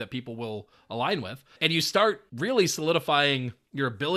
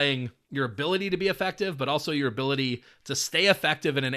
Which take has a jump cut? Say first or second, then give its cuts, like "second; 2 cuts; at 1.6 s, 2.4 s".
first; 2 cuts; at 1.4 s, 2.3 s